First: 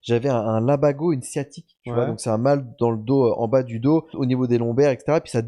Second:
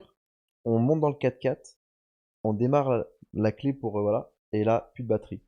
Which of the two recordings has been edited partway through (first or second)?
first